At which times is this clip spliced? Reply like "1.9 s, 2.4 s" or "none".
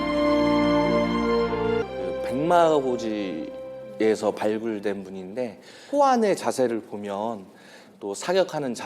1.9 s

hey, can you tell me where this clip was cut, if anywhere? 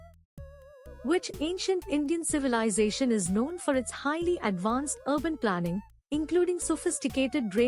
1.0 s

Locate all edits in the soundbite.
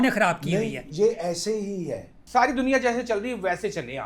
2.2 s

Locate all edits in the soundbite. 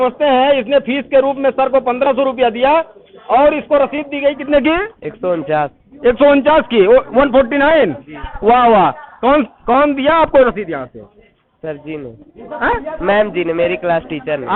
none

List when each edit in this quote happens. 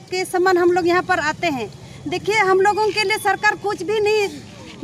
none

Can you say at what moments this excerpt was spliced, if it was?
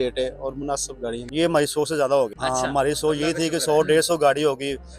1.2 s, 2.4 s

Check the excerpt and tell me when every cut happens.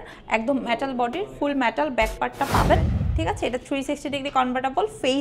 3.0 s

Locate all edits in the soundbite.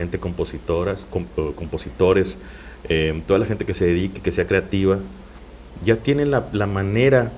none

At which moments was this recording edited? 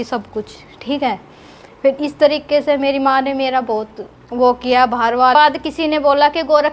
5.3 s

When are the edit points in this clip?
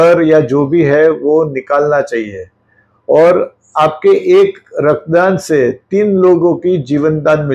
none

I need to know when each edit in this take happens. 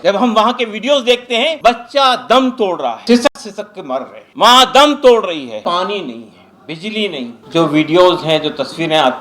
1.6 s, 3.0 s, 4.2 s, 5.6 s, 7.3 s

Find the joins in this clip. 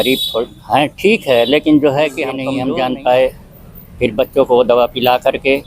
2.4 s

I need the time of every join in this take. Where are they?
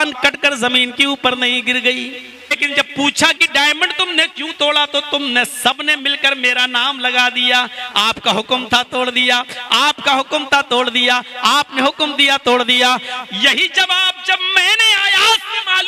2.6 s

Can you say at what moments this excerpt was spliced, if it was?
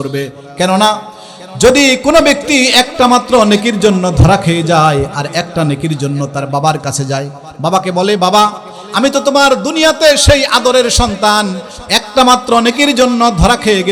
none

